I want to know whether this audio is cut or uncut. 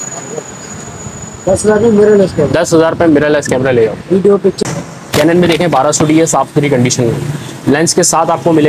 cut